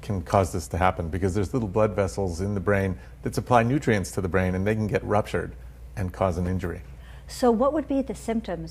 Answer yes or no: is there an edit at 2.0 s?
no